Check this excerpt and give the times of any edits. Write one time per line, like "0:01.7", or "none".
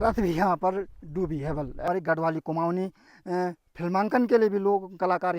0:01.8